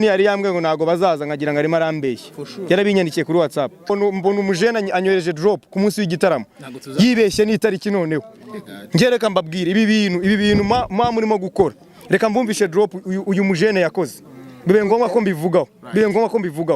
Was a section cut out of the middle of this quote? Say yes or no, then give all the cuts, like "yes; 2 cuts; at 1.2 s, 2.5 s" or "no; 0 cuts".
yes; 1 cut; at 3.9 s